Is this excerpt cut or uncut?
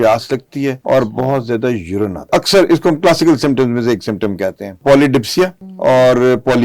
cut